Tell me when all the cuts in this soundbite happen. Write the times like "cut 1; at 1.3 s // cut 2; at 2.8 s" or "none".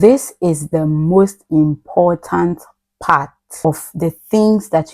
cut 1; at 3.7 s